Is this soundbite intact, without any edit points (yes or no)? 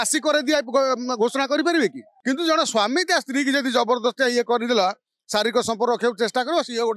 no